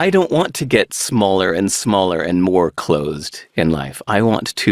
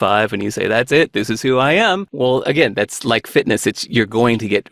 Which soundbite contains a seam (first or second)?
second